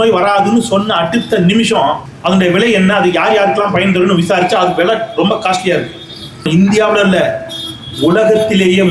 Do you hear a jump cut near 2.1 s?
yes; 2 cuts; at 2.1 s, 6.5 s

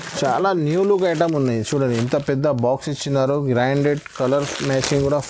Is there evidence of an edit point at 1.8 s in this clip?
no; 0 cuts

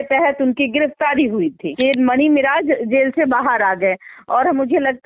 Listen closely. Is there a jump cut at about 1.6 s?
yes; 1 cut; at 1.6 s

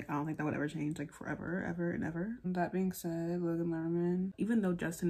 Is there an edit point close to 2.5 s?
yes; 2 cuts; at 2.5 s, 4.3 s

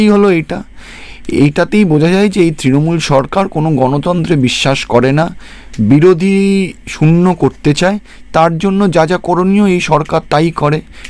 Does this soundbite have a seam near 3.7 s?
no; 0 cuts

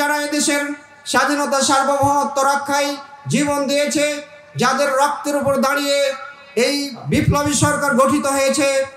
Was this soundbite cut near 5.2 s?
no; 1 cut; at 7.0 s

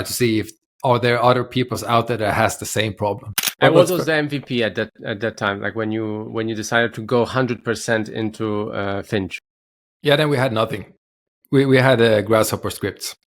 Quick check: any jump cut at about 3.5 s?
yes; 1 cut; at 3.5 s

